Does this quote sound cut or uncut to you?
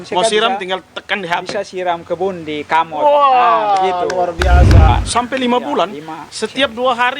cut